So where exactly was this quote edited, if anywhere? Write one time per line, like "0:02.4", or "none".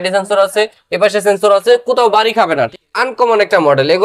0:02.7